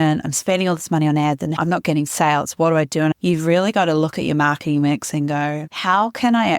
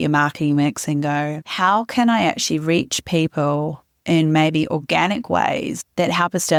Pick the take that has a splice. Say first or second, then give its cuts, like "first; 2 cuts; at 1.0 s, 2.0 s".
first; 2 cuts; at 1.6 s, 3.2 s